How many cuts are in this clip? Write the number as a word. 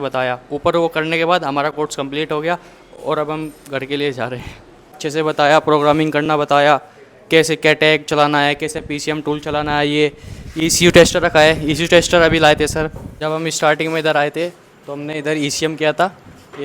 two